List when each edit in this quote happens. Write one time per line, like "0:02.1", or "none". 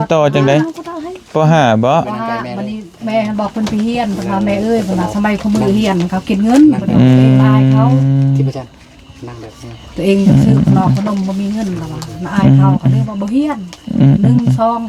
none